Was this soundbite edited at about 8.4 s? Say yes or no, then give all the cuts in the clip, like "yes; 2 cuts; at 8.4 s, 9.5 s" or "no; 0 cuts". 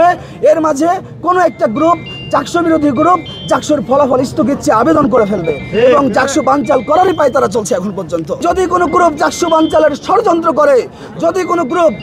yes; 1 cut; at 8.4 s